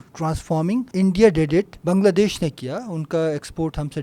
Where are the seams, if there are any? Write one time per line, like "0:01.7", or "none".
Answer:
0:00.9
0:01.8